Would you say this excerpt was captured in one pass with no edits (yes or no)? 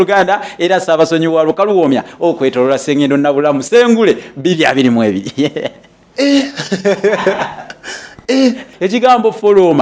no